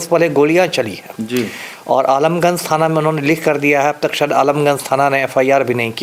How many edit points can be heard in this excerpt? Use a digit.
0